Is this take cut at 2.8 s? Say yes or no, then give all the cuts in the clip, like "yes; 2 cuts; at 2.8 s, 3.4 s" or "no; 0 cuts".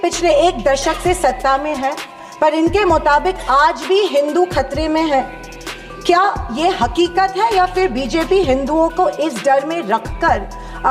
no; 0 cuts